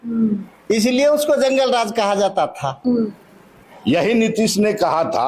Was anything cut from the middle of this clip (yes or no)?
yes